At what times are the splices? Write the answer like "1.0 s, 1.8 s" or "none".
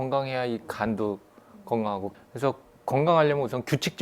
2.1 s